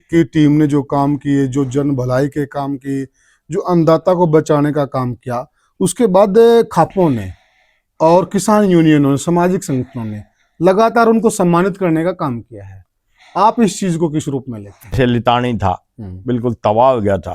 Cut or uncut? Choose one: cut